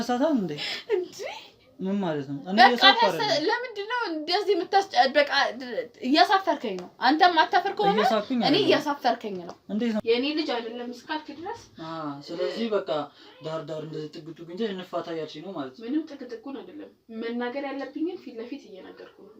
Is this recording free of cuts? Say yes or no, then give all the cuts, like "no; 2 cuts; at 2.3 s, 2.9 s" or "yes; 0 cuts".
no; 1 cut; at 10.0 s